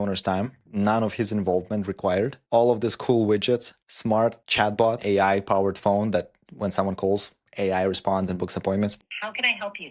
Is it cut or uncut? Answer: cut